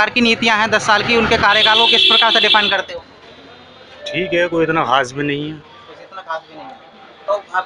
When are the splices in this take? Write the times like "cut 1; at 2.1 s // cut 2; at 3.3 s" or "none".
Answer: none